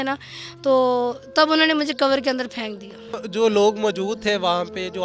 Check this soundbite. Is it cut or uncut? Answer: cut